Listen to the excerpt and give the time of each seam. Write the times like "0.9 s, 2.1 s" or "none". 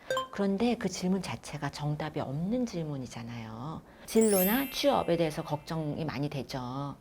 3.9 s